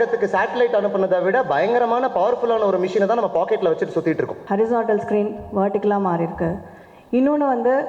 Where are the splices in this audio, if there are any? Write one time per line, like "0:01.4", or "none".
0:04.4